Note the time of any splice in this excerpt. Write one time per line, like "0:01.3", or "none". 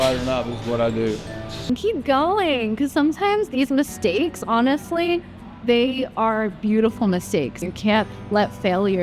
0:01.7
0:07.6